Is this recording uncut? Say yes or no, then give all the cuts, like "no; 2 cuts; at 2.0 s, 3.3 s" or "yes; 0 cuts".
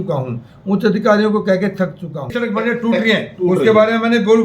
no; 1 cut; at 2.3 s